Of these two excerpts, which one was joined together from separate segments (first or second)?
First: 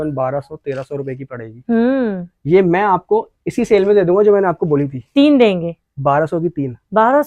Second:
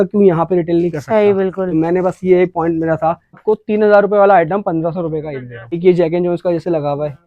second